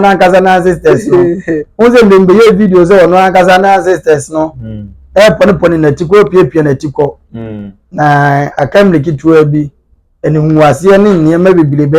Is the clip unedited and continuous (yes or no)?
yes